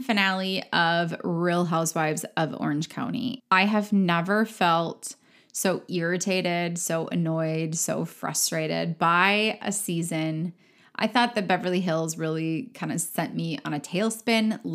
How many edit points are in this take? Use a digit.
1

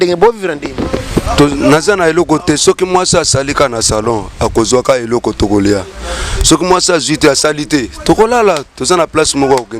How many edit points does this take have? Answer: 0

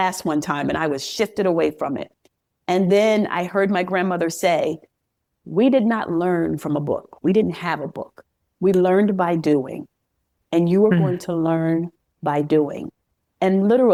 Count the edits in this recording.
0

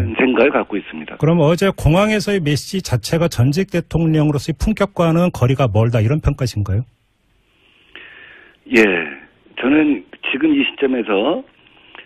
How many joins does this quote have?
1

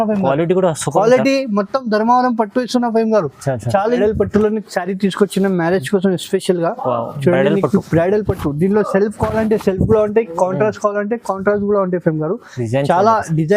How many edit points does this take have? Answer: 1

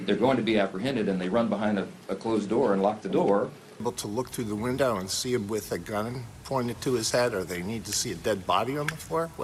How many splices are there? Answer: 0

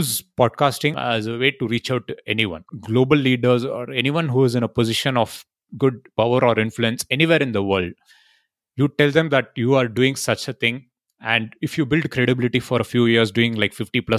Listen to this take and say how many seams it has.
2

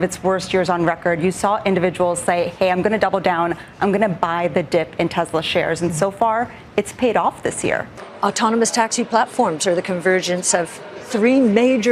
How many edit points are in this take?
1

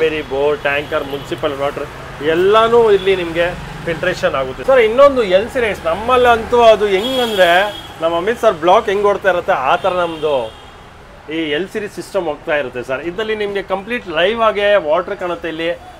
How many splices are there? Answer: 0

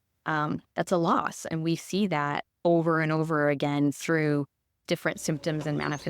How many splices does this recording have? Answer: 1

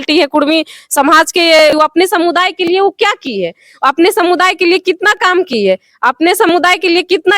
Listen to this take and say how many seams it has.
1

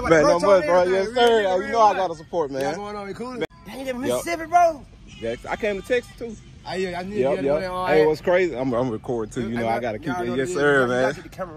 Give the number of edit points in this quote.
1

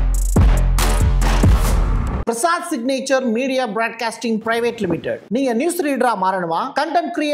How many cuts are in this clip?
1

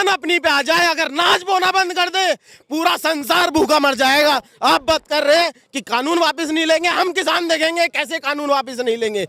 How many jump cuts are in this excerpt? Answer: 0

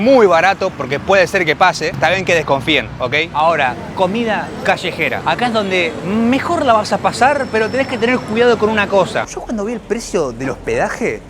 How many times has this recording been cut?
2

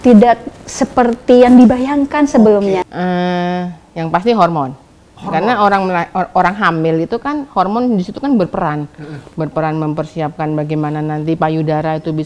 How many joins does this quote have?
1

